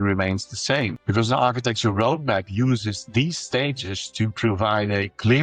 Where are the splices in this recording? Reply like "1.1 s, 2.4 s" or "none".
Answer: 1.0 s